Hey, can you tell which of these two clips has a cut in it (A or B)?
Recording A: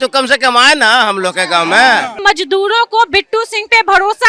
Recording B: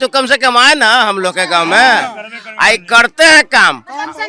A